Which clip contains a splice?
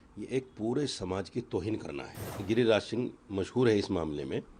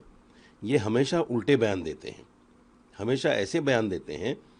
first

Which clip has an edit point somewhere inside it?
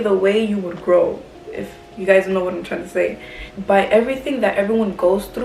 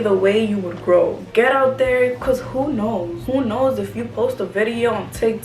second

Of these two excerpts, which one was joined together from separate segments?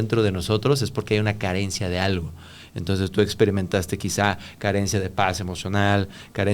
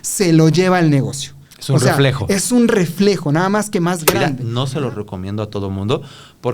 second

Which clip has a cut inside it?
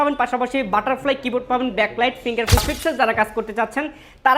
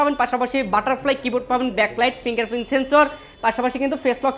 first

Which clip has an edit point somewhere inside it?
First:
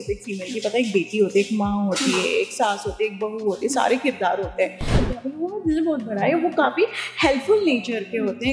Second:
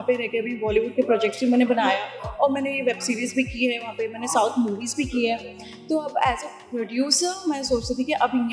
first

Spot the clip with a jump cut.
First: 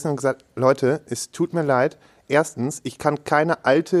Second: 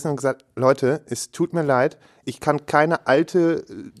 second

